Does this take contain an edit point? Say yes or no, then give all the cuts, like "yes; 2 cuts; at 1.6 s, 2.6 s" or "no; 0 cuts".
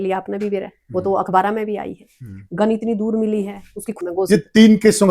yes; 1 cut; at 4.0 s